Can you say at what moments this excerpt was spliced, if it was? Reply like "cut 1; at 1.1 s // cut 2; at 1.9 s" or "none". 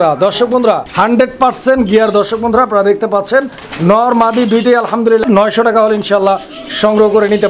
cut 1; at 1.1 s // cut 2; at 5.2 s